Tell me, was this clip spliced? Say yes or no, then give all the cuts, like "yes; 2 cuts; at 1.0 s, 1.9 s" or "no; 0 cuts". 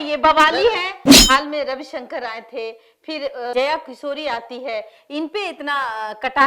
yes; 1 cut; at 1.1 s